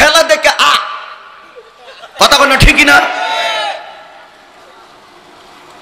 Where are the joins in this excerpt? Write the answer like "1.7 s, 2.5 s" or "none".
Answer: none